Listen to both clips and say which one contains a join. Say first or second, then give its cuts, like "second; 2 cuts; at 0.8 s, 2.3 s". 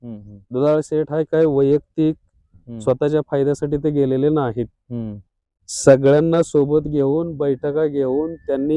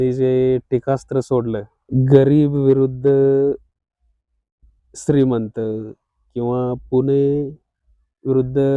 second; 1 cut; at 1.8 s